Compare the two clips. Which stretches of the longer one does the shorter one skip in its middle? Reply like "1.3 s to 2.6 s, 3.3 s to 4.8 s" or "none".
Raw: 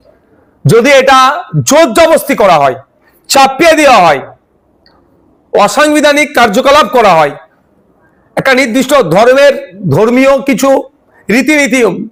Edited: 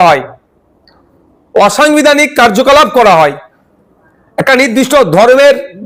none